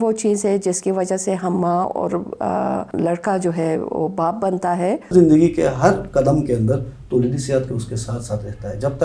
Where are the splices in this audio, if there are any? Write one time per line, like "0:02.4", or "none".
0:02.9
0:05.1